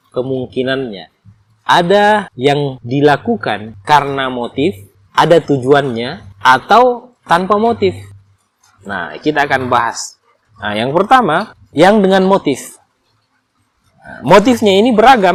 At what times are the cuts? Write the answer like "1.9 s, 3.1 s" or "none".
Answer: none